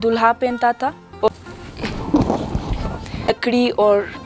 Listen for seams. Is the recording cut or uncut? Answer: cut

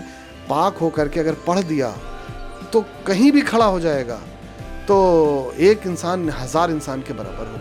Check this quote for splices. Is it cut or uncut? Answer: uncut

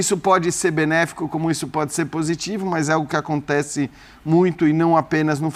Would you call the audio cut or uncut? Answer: uncut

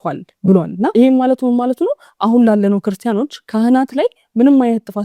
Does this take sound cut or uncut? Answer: uncut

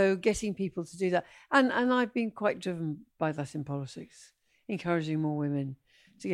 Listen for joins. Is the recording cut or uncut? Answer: uncut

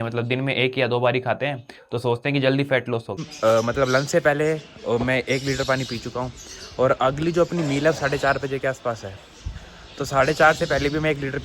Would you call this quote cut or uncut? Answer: cut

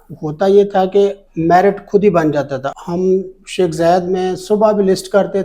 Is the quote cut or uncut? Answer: cut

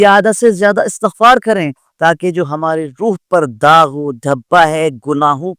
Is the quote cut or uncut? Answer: uncut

